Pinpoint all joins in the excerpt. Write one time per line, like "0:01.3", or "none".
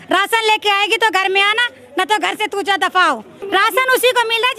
0:03.4

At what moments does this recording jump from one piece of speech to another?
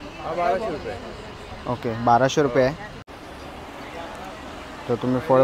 0:03.0

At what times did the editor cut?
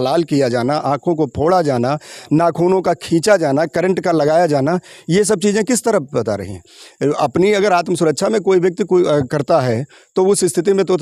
none

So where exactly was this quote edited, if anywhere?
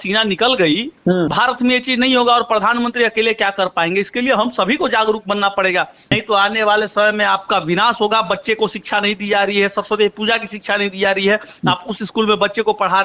0:01.3
0:06.1

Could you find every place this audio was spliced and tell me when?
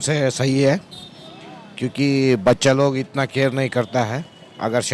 none

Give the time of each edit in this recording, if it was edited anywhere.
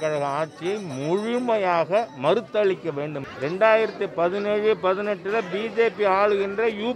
0:03.2

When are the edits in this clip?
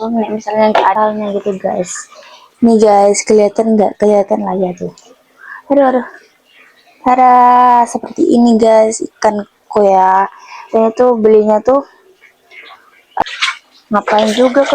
0:00.9
0:13.2

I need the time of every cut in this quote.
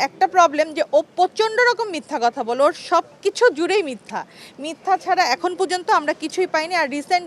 none

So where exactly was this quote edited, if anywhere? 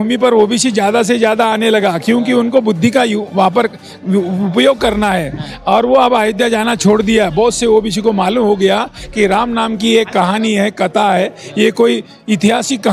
none

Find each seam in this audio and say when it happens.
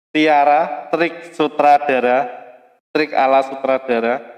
none

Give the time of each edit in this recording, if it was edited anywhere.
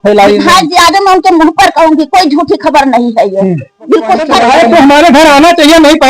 0:04.4

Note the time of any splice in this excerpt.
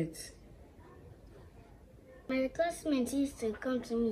0:02.2

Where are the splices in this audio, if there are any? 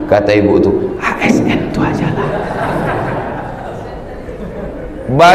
none

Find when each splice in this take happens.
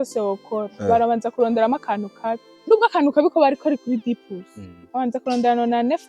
0:02.5

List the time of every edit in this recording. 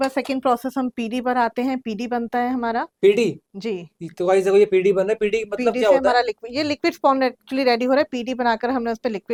none

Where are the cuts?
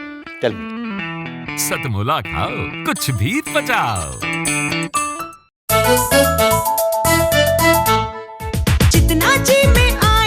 0:05.5

